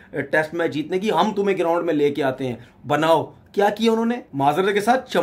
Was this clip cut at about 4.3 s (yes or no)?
yes